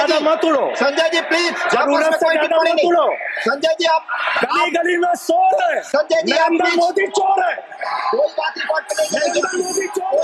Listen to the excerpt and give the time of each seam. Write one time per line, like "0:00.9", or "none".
none